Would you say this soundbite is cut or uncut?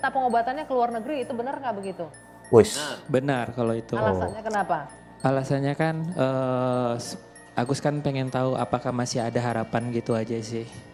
uncut